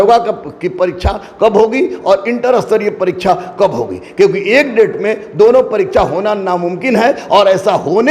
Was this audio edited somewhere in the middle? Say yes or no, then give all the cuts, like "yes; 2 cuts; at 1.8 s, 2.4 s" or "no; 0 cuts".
no; 0 cuts